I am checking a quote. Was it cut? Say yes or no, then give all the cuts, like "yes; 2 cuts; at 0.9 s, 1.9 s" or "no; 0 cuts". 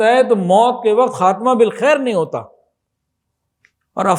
no; 0 cuts